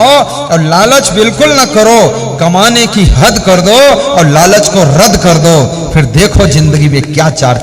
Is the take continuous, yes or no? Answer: yes